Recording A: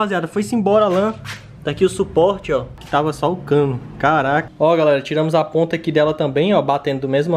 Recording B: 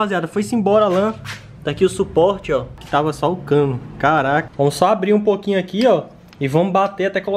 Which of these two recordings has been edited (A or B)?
B